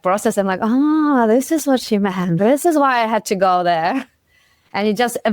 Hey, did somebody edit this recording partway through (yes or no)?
yes